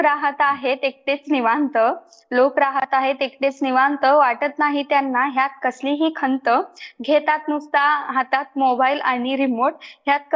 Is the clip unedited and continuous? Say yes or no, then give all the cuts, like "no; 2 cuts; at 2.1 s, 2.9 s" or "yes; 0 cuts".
yes; 0 cuts